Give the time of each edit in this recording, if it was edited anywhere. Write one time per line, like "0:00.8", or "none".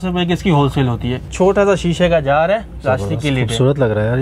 0:01.2